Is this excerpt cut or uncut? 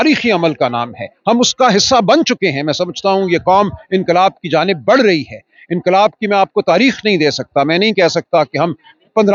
uncut